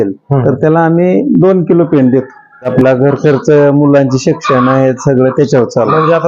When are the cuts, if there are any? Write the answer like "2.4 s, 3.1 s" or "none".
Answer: 2.7 s